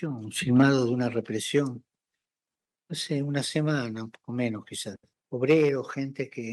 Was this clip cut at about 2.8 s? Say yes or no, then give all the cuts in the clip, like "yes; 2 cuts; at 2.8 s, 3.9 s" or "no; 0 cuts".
no; 0 cuts